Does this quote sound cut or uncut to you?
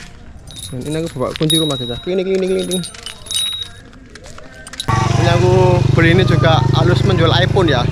cut